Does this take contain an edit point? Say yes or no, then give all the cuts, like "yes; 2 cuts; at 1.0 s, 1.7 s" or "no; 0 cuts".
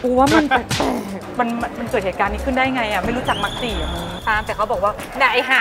yes; 2 cuts; at 1.3 s, 4.1 s